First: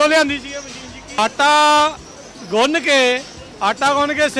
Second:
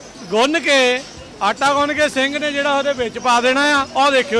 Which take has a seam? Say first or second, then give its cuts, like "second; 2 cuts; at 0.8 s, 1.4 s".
first; 1 cut; at 1.2 s